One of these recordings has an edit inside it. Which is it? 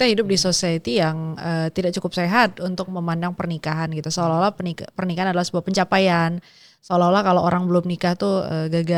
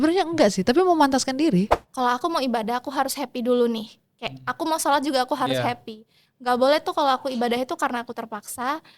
second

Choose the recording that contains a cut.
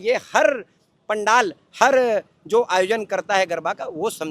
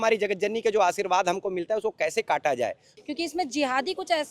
second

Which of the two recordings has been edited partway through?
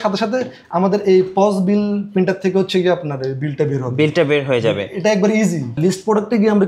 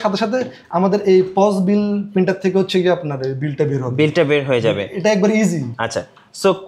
first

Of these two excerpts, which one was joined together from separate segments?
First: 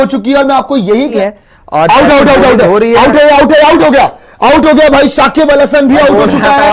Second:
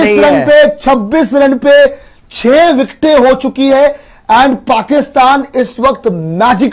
first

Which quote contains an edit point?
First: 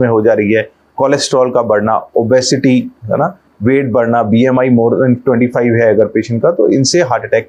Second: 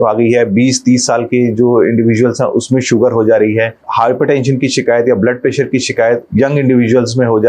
second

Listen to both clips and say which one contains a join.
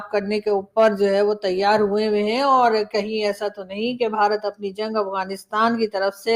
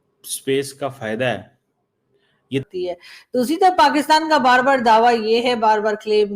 second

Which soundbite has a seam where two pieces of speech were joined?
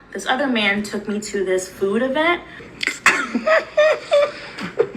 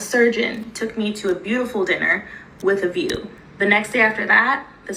first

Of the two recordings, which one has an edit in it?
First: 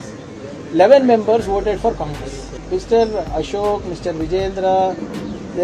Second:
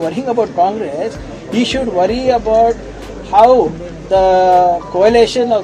first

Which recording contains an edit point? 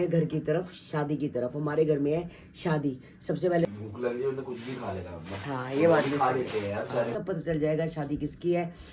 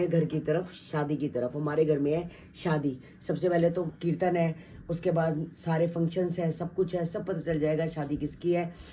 first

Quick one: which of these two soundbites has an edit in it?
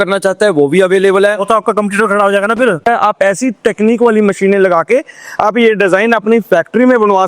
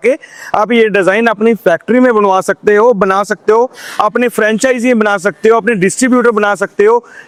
first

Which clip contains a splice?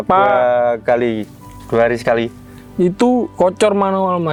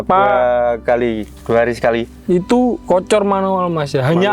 second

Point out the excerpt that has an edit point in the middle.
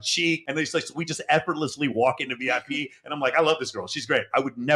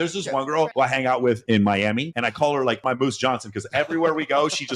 second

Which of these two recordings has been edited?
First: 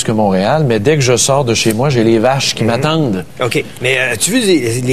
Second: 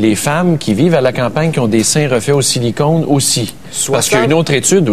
second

